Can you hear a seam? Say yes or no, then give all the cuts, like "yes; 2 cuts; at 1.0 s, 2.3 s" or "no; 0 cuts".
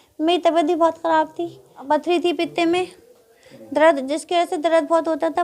yes; 1 cut; at 1.7 s